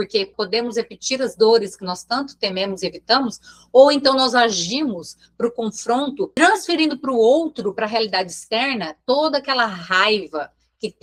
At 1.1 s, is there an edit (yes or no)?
no